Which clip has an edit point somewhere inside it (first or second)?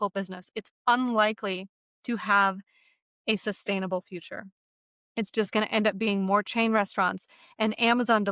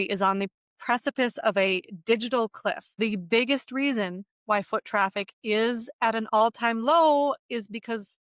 second